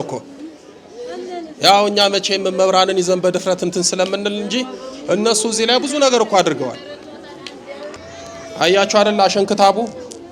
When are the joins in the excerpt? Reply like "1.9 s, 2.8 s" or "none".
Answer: 7.9 s